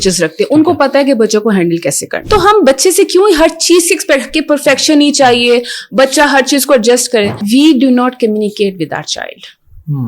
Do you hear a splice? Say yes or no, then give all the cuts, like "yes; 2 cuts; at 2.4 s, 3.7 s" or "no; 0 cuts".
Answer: yes; 2 cuts; at 2.1 s, 7.4 s